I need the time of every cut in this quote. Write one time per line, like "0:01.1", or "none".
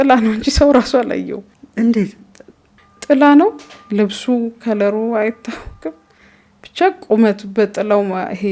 none